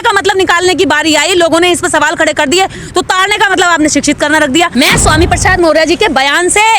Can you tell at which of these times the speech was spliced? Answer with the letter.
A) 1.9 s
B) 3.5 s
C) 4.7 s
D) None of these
C